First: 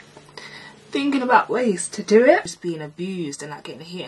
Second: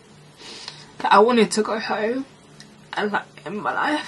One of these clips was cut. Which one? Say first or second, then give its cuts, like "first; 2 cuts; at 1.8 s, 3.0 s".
first; 1 cut; at 2.5 s